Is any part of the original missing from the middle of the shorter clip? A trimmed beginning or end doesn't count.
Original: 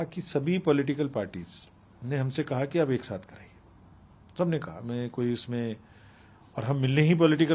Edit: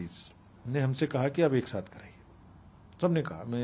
no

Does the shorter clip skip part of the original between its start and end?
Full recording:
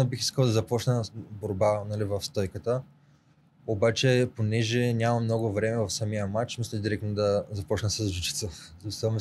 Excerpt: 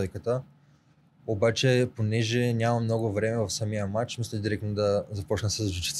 no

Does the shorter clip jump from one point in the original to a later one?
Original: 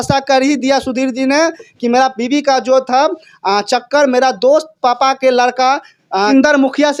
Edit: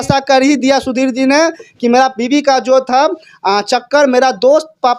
no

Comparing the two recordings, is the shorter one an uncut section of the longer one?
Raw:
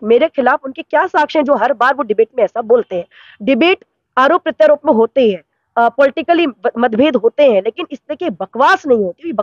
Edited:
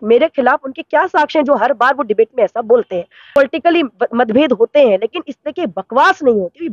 no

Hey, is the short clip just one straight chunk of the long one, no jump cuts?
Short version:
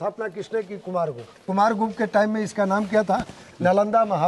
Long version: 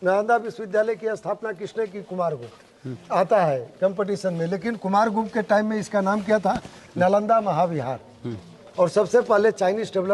no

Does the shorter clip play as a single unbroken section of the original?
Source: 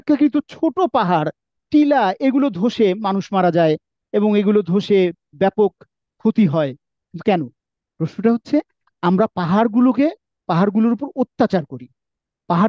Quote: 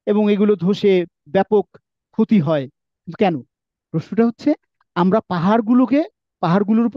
yes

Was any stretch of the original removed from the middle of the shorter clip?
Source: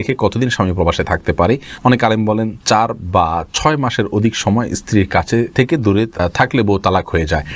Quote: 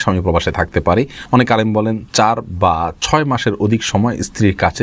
no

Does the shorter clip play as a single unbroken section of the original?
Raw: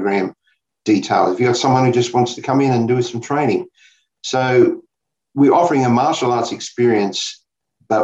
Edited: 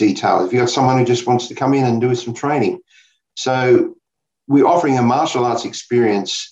yes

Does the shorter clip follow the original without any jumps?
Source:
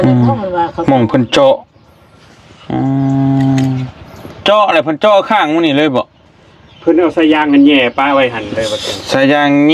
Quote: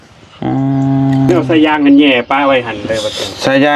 no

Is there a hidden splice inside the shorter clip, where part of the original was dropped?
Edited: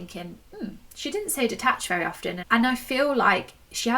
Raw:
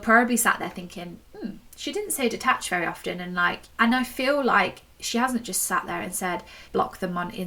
yes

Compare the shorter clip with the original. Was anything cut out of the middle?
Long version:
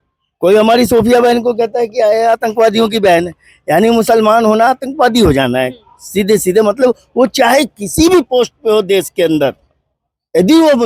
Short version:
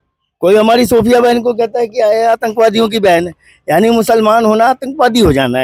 no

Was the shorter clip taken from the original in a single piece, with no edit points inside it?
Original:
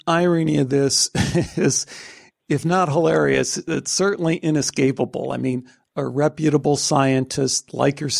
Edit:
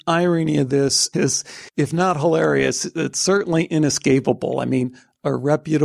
no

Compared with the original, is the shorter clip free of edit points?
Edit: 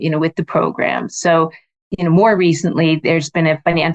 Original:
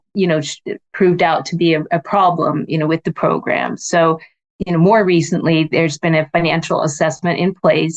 yes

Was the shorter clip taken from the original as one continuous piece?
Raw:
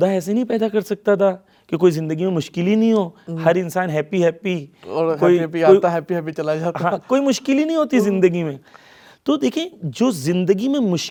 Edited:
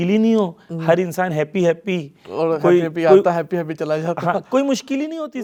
yes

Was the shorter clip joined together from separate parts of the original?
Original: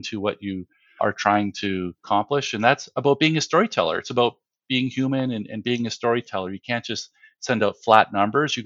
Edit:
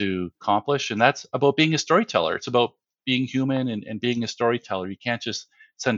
no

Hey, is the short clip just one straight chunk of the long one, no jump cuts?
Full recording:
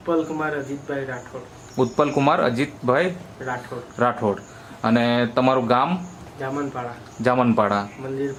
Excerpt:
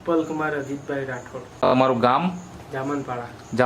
no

